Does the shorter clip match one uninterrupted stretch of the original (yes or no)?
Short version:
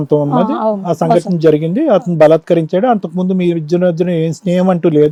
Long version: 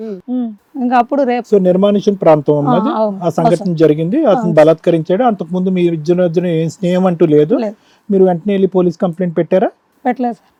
yes